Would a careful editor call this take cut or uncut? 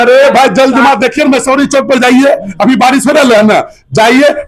uncut